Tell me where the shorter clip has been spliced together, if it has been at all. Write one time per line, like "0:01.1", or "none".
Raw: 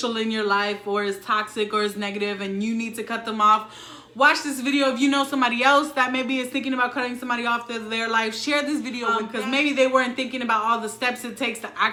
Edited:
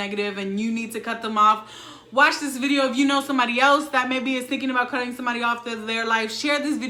none